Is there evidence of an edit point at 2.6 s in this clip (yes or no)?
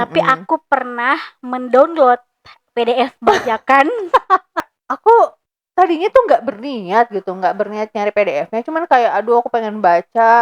no